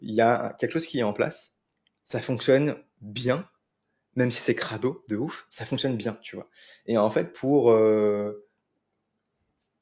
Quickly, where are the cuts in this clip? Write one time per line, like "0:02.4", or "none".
none